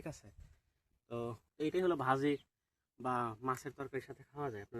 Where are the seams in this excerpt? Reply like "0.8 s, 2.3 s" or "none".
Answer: 1.4 s